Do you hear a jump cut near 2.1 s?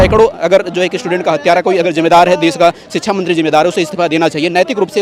no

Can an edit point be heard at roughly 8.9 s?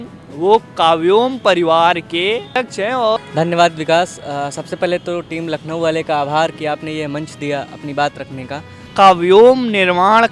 yes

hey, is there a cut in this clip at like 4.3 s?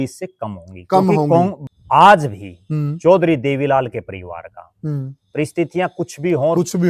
no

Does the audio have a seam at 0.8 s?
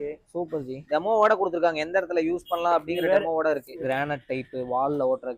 yes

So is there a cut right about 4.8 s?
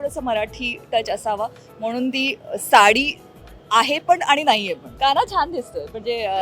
yes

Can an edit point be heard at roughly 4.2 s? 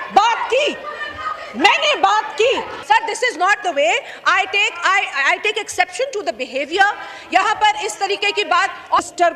no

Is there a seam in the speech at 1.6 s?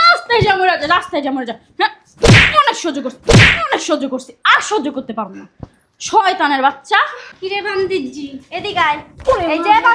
no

